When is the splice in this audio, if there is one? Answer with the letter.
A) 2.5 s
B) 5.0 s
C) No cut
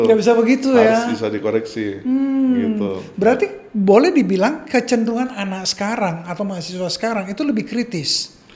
C